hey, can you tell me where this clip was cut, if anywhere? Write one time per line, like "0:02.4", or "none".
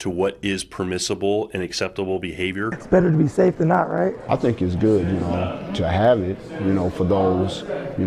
0:02.8